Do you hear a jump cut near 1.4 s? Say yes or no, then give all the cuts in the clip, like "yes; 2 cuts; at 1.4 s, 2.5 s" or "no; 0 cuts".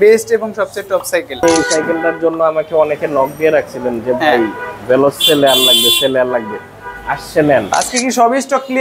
yes; 2 cuts; at 1.4 s, 7.7 s